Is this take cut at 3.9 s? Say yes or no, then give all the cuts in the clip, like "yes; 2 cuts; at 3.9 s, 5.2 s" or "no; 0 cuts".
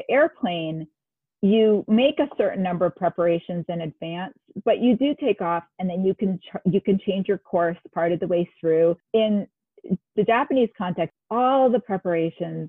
no; 2 cuts; at 9.0 s, 11.1 s